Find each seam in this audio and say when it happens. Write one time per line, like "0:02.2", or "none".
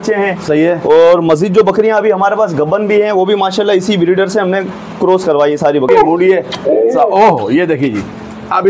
0:05.9

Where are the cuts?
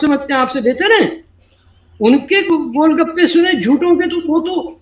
none

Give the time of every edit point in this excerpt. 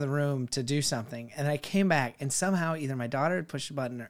none

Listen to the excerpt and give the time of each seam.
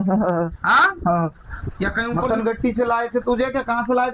0:02.3

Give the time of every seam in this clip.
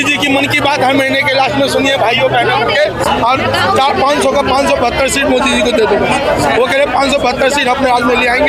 none

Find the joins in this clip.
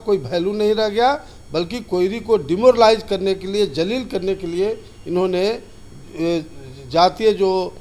none

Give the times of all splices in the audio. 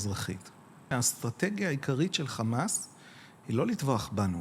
0:00.9

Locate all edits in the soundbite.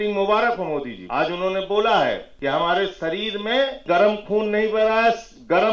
0:01.0
0:02.3
0:03.8

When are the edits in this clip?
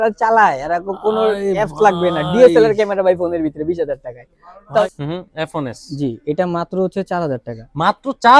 0:04.8

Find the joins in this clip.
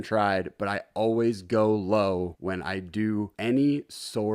none

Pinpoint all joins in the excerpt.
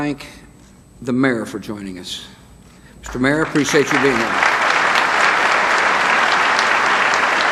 none

